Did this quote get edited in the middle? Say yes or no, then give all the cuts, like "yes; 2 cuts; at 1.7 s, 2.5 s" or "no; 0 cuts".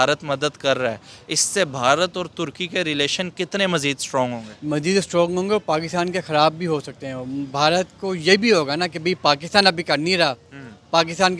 no; 0 cuts